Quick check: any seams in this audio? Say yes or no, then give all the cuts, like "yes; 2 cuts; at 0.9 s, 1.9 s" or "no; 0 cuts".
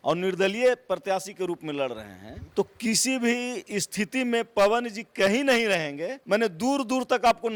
no; 0 cuts